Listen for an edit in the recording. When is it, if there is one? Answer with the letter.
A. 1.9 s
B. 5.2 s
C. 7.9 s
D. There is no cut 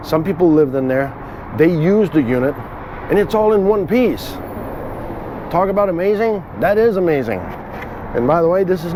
D